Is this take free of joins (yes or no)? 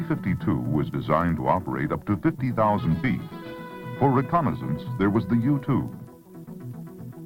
no